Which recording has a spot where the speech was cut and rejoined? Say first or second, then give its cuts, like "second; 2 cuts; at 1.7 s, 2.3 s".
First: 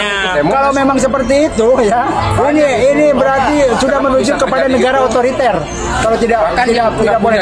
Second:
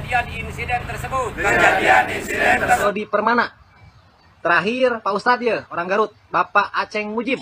second; 1 cut; at 2.8 s